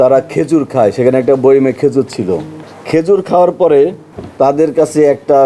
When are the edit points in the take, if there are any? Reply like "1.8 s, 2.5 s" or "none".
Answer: none